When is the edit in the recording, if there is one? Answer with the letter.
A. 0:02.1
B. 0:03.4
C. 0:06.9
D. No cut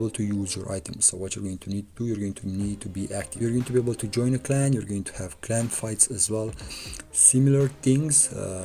B